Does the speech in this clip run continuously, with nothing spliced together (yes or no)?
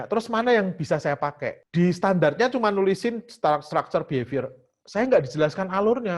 no